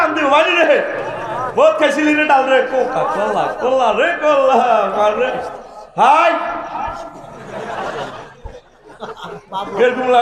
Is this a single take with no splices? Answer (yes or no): yes